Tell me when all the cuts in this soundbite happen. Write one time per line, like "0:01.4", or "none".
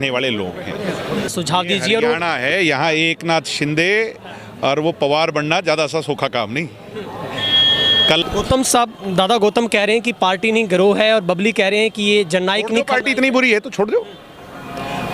0:01.3
0:08.2